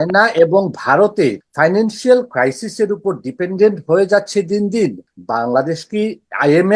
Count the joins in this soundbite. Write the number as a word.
two